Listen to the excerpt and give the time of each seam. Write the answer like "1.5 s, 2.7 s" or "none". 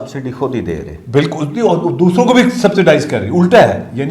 none